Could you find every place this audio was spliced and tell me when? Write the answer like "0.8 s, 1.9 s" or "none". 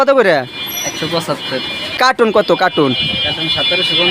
1.9 s